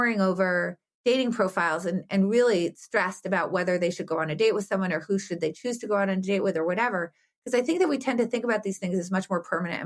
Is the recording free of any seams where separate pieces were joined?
yes; 0 cuts

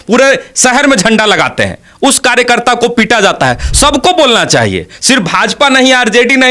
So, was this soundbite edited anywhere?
no; 0 cuts

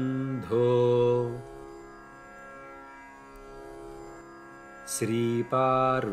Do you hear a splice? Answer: yes; 2 cuts; at 1.6 s, 5.0 s

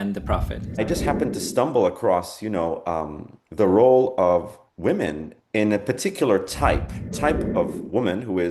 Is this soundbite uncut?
no; 2 cuts; at 0.8 s, 7.0 s

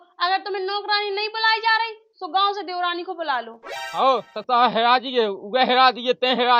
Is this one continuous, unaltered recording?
no; 1 cut; at 3.7 s

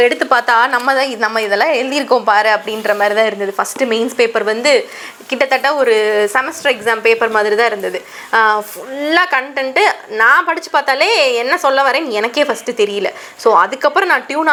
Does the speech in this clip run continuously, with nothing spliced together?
yes; 0 cuts

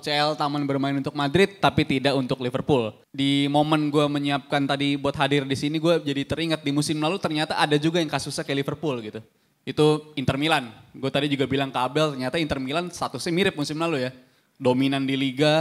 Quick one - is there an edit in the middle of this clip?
yes; 1 cut; at 3.0 s

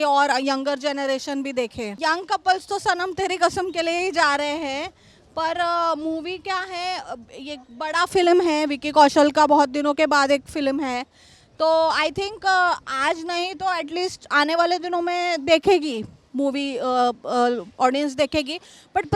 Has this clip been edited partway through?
no; 0 cuts

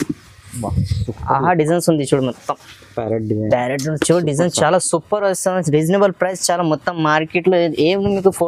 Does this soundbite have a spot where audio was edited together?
no; 0 cuts

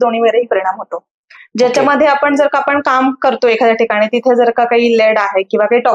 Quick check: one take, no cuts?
yes; 0 cuts

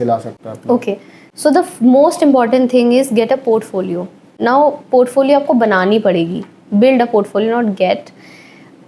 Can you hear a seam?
no; 0 cuts

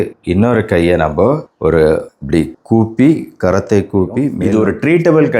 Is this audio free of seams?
no; 1 cut; at 4.4 s

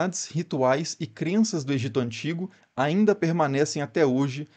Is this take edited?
no; 0 cuts

